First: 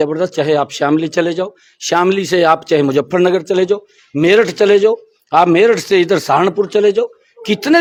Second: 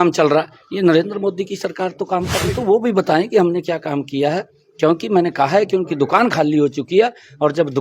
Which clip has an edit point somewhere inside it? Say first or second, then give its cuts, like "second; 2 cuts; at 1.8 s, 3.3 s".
second; 1 cut; at 2.5 s